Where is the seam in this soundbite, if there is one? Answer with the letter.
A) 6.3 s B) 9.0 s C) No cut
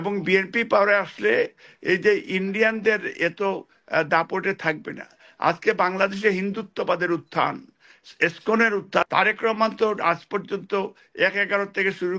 B